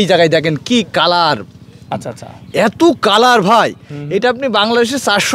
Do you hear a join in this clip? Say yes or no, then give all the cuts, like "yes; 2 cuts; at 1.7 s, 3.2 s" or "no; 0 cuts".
no; 0 cuts